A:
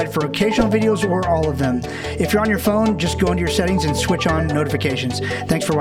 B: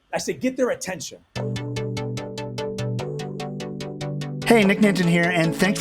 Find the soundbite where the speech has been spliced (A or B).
B